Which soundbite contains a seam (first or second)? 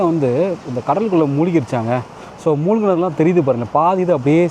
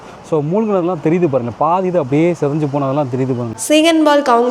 second